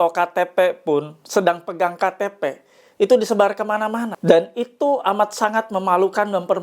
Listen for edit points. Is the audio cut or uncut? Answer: cut